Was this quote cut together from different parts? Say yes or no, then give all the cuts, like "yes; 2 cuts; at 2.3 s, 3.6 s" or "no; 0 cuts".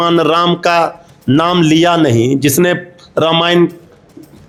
no; 0 cuts